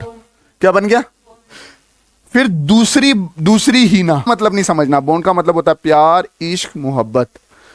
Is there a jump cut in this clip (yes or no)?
yes